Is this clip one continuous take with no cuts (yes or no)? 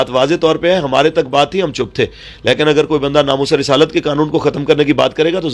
yes